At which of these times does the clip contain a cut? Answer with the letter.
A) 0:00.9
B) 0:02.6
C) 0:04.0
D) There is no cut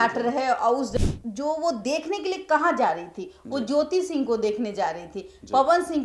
A